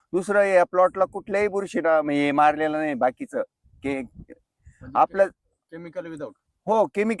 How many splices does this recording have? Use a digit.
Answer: 0